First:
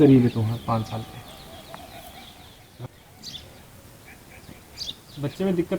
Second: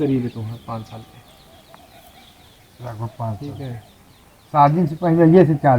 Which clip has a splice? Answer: first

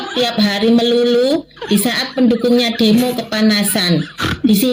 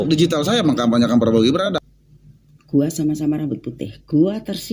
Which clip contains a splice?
second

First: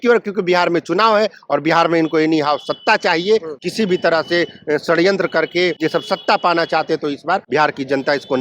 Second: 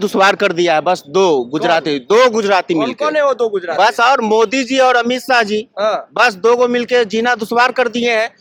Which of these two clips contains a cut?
first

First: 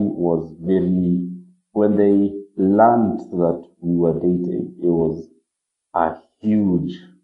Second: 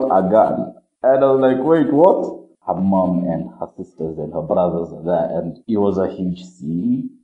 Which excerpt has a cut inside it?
second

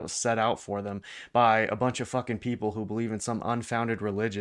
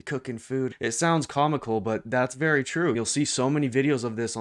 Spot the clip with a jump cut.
second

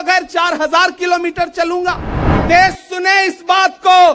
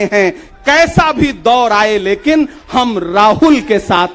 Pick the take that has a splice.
first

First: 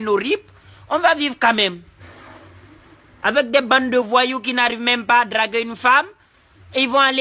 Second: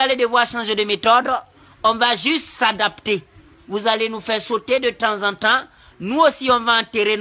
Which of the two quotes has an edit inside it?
second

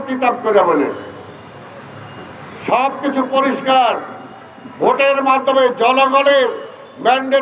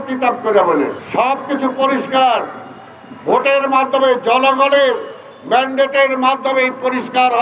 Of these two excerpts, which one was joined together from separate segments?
second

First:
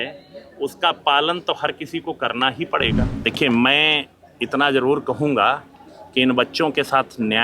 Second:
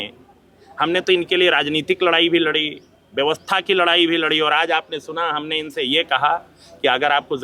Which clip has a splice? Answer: first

